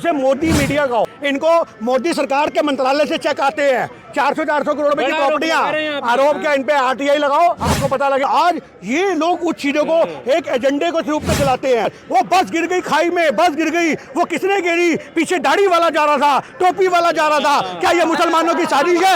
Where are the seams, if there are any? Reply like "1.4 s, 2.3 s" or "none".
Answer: 1.1 s, 8.2 s, 11.8 s

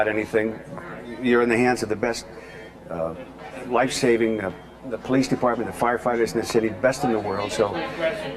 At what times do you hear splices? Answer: 6.5 s

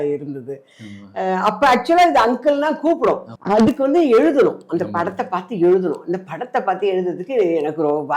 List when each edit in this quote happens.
3.3 s

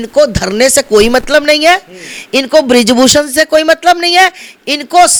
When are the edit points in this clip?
none

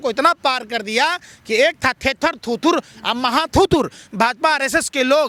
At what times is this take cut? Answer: none

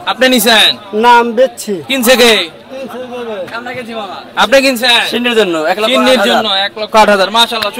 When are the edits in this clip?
none

